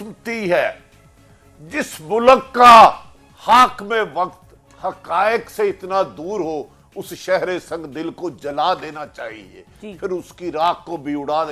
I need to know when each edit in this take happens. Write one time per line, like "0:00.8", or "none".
none

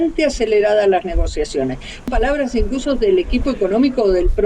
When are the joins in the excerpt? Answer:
0:02.1

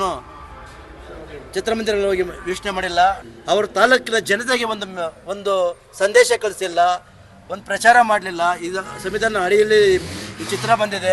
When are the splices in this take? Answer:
0:03.2

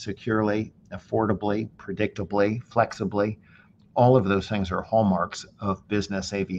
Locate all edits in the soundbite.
none

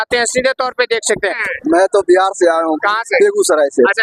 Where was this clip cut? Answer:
0:01.5

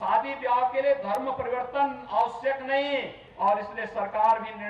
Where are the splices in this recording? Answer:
0:03.2

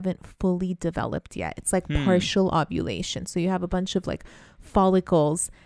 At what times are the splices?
none

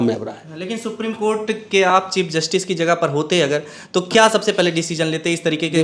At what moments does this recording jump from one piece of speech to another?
none

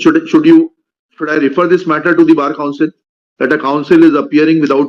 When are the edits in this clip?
none

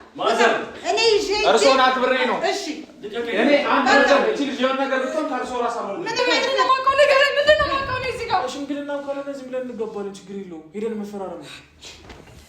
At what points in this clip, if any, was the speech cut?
0:06.5

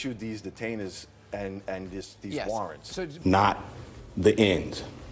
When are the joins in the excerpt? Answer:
0:03.1

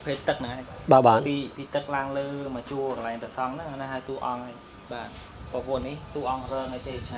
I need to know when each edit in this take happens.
0:04.7

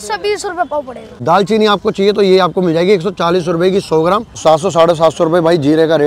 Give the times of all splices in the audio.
0:01.1
0:04.4

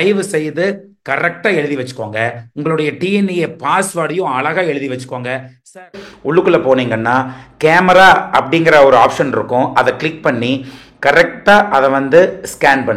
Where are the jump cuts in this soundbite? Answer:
0:05.8

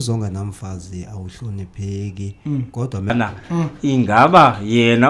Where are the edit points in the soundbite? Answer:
0:03.1

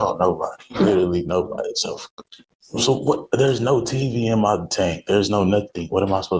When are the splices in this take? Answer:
none

